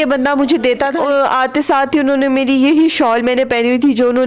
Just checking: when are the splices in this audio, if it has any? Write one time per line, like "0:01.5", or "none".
0:00.9